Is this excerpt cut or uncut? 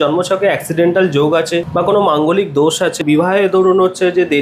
cut